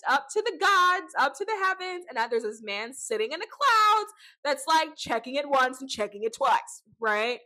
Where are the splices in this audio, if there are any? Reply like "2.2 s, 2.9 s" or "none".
none